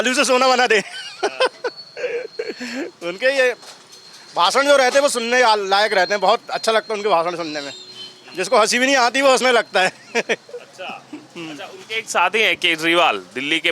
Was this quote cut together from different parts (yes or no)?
no